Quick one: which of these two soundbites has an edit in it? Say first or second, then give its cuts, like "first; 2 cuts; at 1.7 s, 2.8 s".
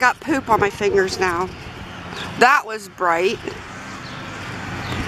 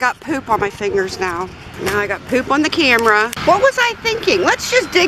second; 2 cuts; at 1.6 s, 3.3 s